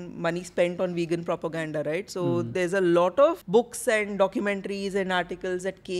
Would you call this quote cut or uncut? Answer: cut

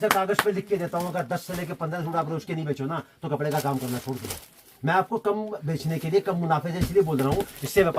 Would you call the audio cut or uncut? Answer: uncut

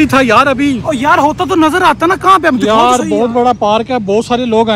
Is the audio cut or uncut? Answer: uncut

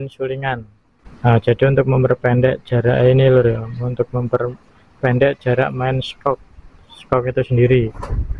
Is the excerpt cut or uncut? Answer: uncut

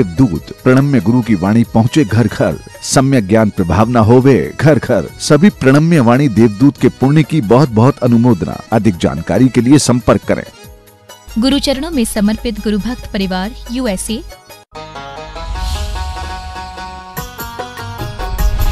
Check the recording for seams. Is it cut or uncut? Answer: cut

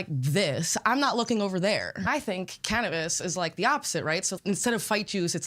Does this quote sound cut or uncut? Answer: cut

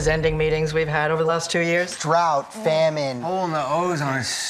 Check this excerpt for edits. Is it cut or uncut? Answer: uncut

